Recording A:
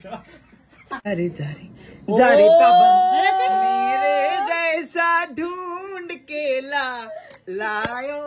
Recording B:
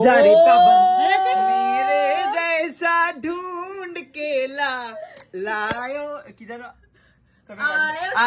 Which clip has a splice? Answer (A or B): A